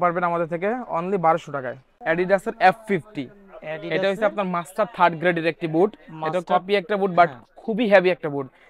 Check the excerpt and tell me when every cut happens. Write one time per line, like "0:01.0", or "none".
0:01.9